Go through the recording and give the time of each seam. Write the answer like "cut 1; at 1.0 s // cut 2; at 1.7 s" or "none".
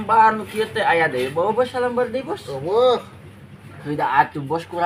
none